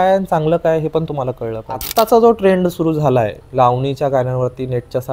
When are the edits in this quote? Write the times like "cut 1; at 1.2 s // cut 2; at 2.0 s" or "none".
cut 1; at 1.8 s // cut 2; at 3.4 s